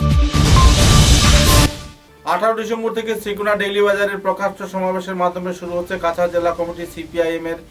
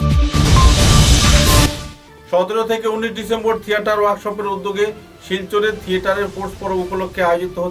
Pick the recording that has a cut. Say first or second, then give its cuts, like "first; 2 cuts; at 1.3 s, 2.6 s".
second; 1 cut; at 1.7 s